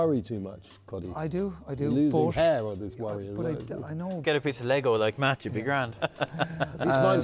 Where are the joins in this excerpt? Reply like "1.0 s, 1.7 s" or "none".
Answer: 4.2 s, 6.0 s